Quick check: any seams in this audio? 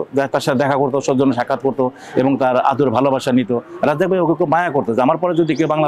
no; 0 cuts

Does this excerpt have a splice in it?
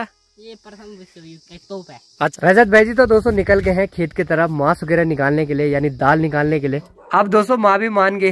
yes; 2 cuts; at 2.3 s, 6.8 s

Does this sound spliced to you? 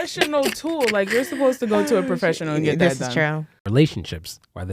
yes; 1 cut; at 3.5 s

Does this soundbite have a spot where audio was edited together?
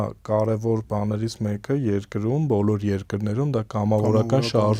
no; 0 cuts

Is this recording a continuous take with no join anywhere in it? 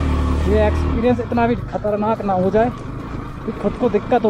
yes; 0 cuts

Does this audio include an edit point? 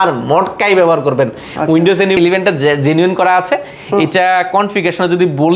no; 0 cuts

